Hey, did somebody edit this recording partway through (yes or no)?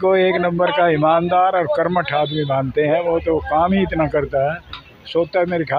no